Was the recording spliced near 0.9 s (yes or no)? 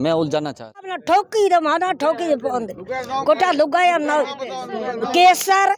yes